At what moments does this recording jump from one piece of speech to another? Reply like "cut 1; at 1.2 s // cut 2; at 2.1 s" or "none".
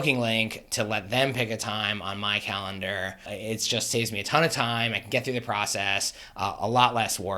cut 1; at 3.3 s